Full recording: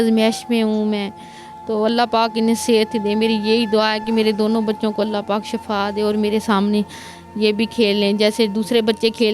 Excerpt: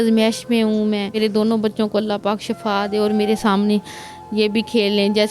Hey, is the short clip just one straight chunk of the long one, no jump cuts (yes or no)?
no